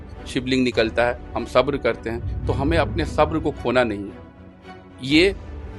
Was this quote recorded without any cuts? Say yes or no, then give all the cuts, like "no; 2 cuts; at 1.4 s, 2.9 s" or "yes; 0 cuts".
yes; 0 cuts